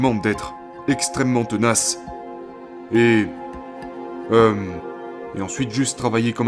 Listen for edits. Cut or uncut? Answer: uncut